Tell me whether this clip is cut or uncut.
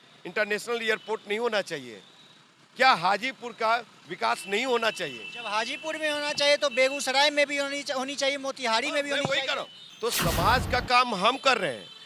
cut